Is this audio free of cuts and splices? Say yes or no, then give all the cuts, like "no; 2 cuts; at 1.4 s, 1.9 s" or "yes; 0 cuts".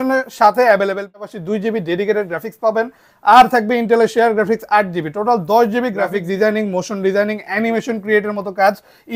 no; 2 cuts; at 1.1 s, 6.2 s